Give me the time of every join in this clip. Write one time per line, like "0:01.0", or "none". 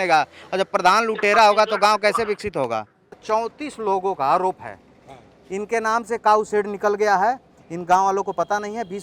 0:03.2

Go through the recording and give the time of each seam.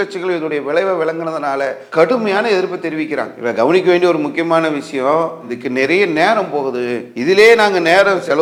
none

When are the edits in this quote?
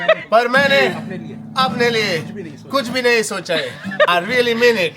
0:04.1

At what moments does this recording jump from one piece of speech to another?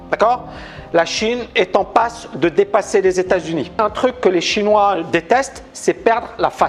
0:03.8

